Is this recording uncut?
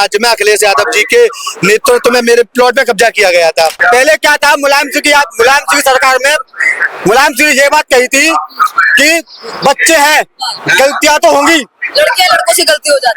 no; 1 cut; at 3.8 s

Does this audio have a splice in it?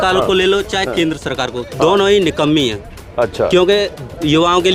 no; 0 cuts

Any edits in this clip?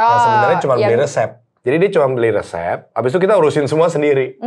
yes; 1 cut; at 1.4 s

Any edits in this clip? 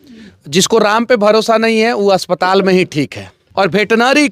yes; 1 cut; at 3.4 s

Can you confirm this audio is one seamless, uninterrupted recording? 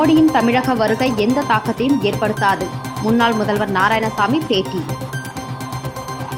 yes; 0 cuts

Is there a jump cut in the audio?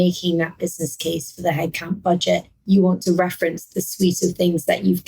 yes; 1 cut; at 2.5 s

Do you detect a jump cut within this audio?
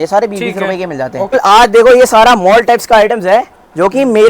yes; 1 cut; at 1.3 s

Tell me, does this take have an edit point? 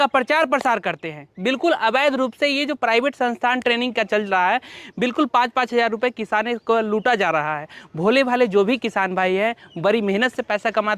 no; 0 cuts

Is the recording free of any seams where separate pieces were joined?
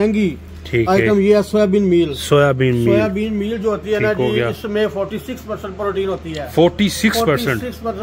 yes; 0 cuts

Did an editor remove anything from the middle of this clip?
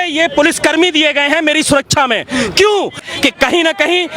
yes; 1 cut; at 3.0 s

